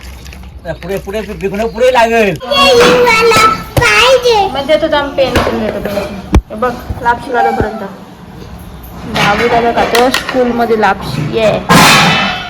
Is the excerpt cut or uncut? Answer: cut